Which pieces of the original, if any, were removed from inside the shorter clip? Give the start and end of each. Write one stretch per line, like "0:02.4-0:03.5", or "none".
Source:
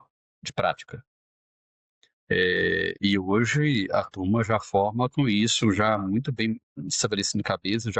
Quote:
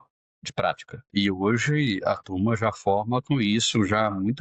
0:01.1-0:02.9